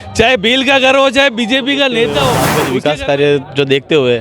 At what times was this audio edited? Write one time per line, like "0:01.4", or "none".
0:02.5